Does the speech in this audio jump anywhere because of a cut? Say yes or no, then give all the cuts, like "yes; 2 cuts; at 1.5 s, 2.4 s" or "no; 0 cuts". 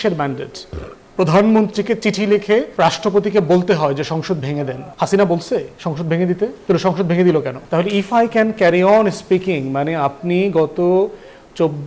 yes; 4 cuts; at 2.7 s, 4.8 s, 6.6 s, 7.6 s